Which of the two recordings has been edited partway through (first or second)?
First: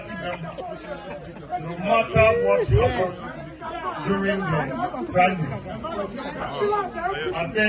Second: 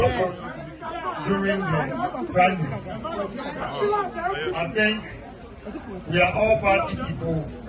first